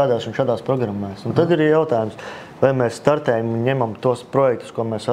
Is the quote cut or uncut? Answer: uncut